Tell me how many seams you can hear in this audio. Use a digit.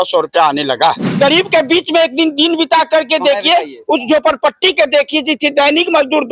1